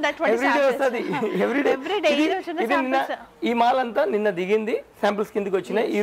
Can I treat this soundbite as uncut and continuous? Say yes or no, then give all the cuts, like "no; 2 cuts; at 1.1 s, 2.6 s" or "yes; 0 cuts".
yes; 0 cuts